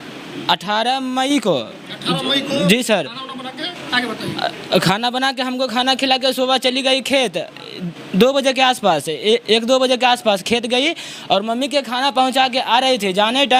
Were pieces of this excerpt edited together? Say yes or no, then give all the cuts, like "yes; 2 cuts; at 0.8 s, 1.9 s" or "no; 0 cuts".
no; 0 cuts